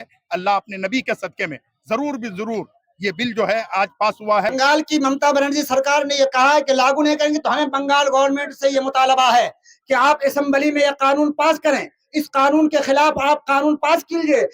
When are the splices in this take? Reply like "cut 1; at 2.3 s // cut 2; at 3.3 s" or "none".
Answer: cut 1; at 4.5 s

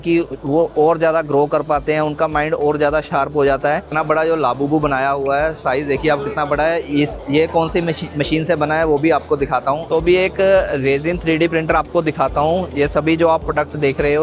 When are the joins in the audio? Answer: cut 1; at 3.9 s // cut 2; at 9.8 s

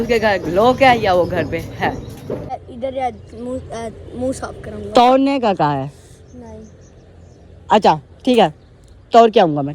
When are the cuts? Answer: cut 1; at 2.6 s

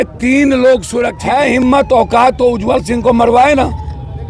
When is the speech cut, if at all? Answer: cut 1; at 1.2 s

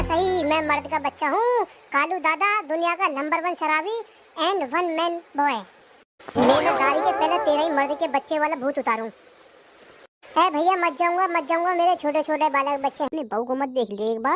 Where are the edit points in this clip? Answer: cut 1; at 13.1 s

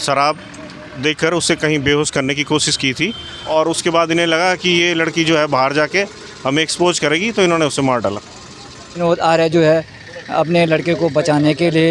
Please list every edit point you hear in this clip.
cut 1; at 3.3 s // cut 2; at 9.0 s

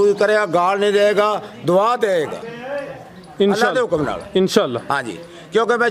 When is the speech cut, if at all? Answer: none

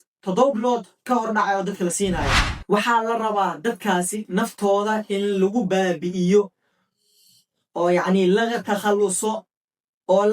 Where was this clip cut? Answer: cut 1; at 2.5 s

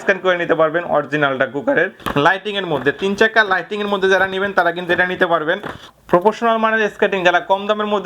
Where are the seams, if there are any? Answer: cut 1; at 2.0 s // cut 2; at 5.9 s

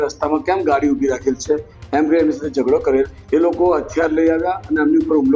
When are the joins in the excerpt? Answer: cut 1; at 3.2 s

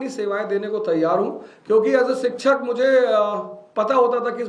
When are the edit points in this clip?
none

